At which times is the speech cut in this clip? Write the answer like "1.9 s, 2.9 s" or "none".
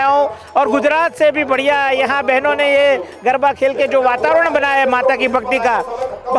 none